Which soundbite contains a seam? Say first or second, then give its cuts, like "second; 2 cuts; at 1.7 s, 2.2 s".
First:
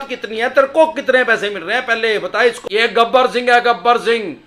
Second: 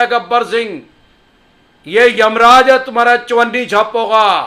first; 1 cut; at 2.6 s